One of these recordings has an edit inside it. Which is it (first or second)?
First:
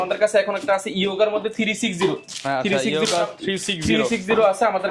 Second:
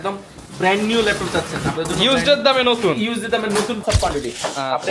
second